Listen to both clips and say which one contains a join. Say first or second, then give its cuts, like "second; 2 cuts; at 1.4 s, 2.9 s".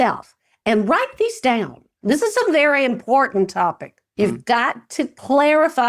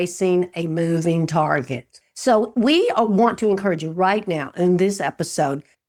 first; 1 cut; at 1.9 s